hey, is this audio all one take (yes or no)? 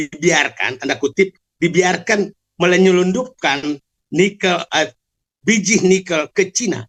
yes